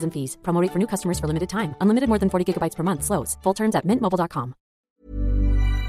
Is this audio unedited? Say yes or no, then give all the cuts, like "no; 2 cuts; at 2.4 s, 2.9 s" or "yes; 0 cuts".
no; 1 cut; at 4.9 s